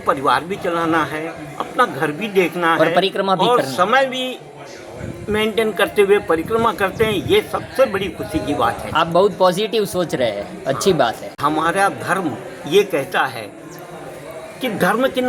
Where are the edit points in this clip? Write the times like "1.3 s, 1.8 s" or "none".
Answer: none